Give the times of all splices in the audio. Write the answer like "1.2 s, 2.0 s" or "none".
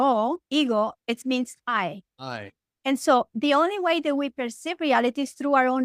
none